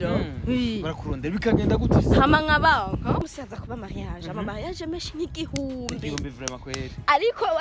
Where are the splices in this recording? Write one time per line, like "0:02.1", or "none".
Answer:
0:03.2